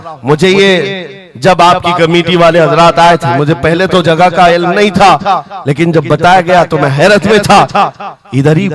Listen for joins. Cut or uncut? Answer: uncut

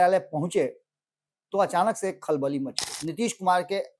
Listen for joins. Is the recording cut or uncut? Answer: cut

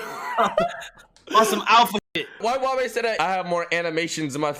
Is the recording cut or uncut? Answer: cut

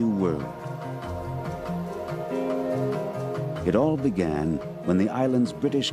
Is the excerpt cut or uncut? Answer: cut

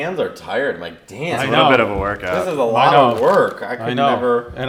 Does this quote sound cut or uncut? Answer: uncut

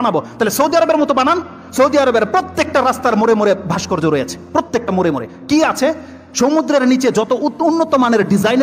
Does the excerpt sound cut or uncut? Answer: uncut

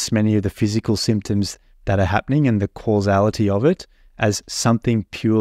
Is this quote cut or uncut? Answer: uncut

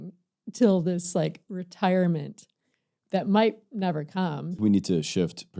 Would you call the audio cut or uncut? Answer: cut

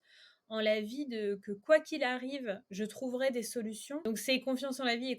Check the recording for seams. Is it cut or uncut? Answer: cut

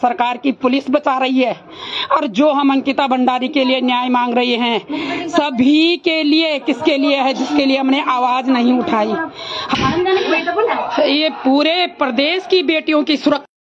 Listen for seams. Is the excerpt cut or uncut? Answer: cut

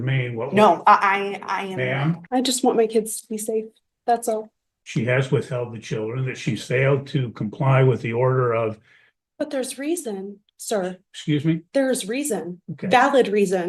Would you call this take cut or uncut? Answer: cut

